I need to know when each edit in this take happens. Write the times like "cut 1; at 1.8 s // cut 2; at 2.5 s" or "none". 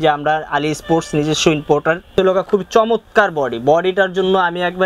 cut 1; at 2.0 s